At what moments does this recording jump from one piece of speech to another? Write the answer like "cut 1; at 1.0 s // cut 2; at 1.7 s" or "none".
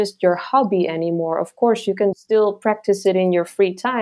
cut 1; at 2.1 s